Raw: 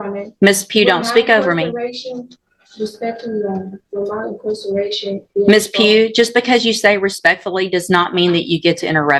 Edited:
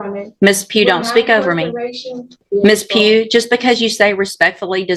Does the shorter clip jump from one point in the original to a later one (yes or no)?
yes